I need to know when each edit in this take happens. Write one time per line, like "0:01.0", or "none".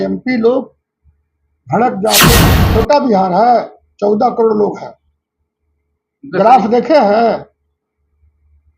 0:02.3